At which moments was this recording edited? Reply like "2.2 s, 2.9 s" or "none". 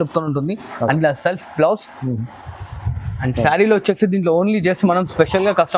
none